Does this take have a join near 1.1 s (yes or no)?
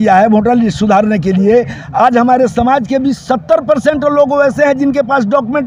no